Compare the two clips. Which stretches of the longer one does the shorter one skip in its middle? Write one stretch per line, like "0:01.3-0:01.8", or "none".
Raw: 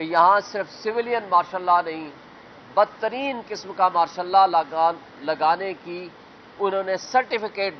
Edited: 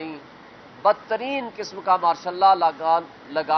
none